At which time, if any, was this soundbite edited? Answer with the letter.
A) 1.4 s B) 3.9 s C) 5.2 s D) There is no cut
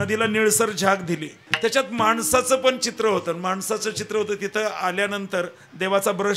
A